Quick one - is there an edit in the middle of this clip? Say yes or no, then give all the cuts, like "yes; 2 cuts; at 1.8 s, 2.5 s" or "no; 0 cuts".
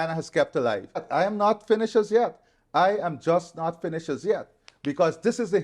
yes; 1 cut; at 1.0 s